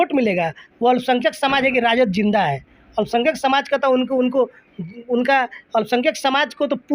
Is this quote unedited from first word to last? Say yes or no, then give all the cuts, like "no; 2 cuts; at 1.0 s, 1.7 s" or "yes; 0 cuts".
yes; 0 cuts